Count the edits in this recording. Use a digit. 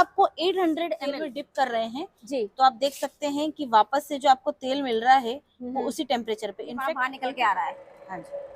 2